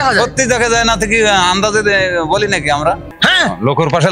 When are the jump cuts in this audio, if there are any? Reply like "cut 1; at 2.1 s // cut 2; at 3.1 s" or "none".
cut 1; at 3.1 s